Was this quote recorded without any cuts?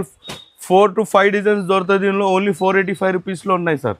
yes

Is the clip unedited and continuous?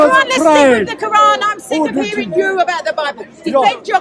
yes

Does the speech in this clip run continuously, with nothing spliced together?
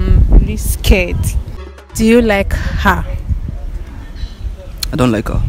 no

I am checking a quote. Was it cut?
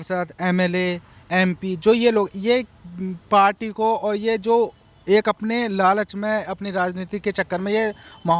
no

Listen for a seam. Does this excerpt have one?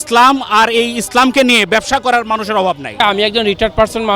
yes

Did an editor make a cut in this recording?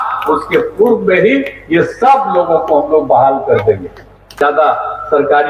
yes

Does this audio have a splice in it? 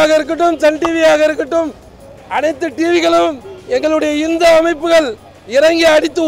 no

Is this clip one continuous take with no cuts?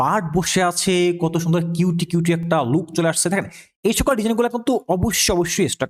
yes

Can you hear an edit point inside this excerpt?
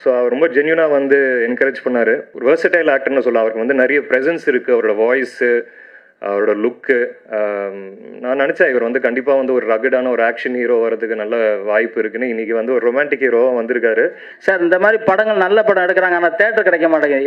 yes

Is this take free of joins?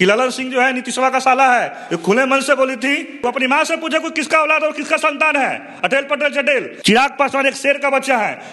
no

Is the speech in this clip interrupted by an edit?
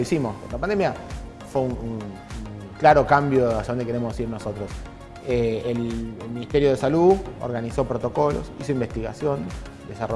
no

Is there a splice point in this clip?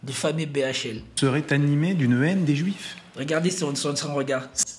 no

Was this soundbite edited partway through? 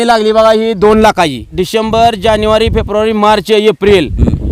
yes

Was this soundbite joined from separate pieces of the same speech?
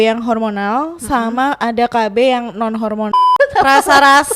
yes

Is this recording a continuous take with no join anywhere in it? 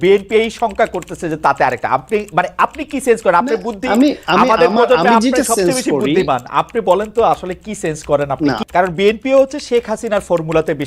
no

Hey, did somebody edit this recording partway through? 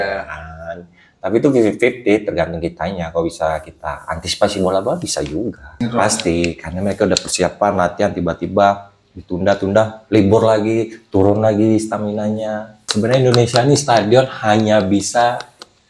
yes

